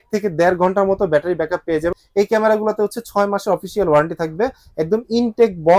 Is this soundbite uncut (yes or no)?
no